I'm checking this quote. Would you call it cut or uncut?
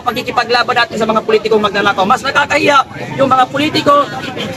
uncut